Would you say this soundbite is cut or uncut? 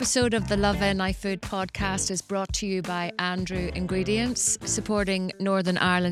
uncut